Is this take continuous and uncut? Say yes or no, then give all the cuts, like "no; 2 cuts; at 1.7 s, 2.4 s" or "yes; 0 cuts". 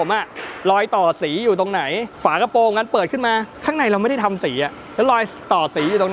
no; 2 cuts; at 2.1 s, 3.5 s